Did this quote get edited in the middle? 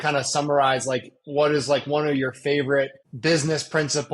yes; 1 cut; at 3.0 s

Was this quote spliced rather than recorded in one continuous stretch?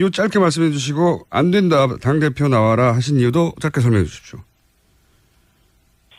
no; 0 cuts

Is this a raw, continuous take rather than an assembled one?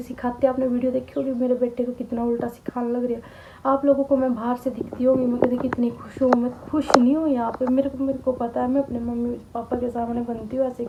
yes; 0 cuts

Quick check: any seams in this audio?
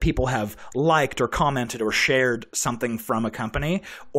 no; 0 cuts

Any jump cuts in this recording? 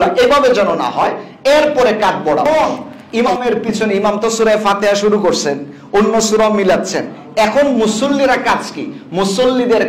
yes; 1 cut; at 2.4 s

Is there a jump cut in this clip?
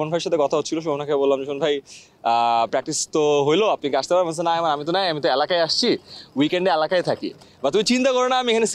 no; 0 cuts

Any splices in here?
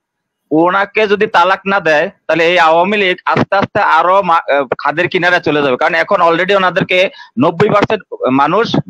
no; 0 cuts

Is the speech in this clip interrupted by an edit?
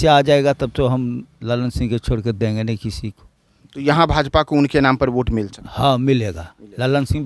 no; 0 cuts

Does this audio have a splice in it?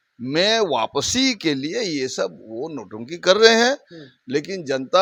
no; 0 cuts

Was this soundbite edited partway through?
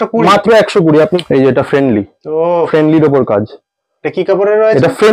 yes; 1 cut; at 1.2 s

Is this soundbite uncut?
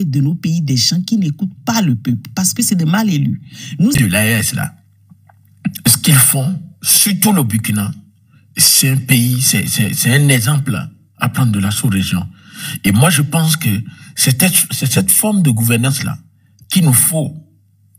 no; 1 cut; at 4.0 s

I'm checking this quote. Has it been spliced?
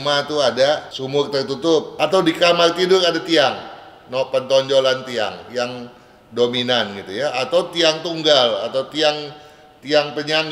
yes; 2 cuts; at 0.9 s, 1.9 s

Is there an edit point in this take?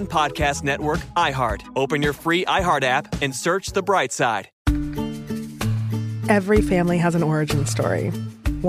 yes; 1 cut; at 4.5 s

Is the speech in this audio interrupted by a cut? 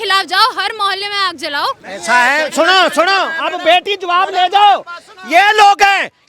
yes; 1 cut; at 1.9 s

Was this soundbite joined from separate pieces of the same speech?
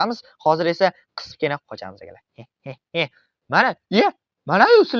no; 0 cuts

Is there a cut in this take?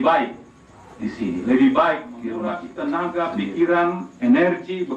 yes; 1 cut; at 2.7 s

